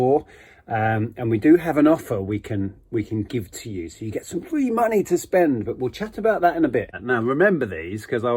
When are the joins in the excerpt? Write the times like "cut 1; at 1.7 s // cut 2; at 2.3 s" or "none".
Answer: cut 1; at 6.9 s